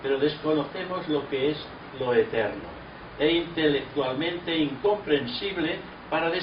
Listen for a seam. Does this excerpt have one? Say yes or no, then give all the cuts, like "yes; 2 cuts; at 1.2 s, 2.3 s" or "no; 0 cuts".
yes; 1 cut; at 1.4 s